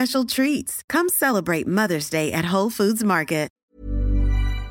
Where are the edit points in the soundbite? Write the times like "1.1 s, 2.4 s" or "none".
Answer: 3.5 s